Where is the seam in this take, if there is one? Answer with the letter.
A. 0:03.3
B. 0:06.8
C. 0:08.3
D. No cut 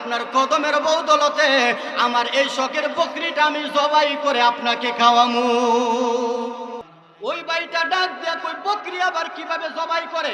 B